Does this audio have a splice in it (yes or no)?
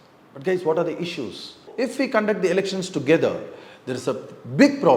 yes